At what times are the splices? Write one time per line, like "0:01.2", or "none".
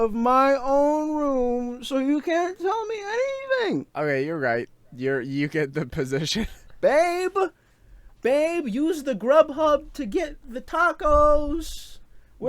0:03.9
0:06.6

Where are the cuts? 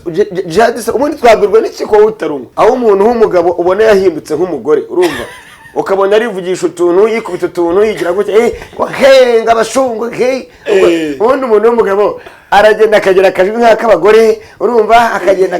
0:02.4

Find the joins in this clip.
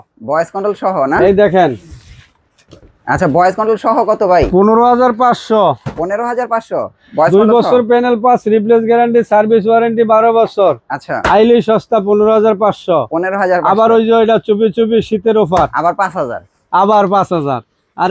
none

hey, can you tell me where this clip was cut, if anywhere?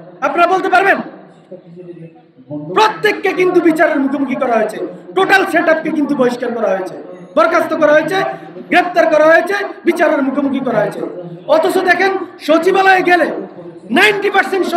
none

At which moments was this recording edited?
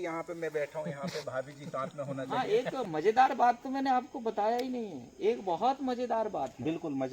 0:02.3

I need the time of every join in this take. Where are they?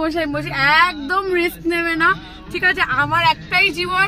none

